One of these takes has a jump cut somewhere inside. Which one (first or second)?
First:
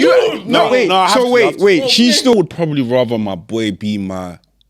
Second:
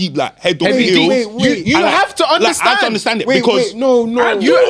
first